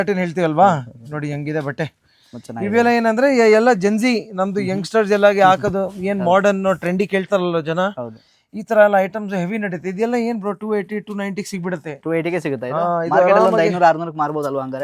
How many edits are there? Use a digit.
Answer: 0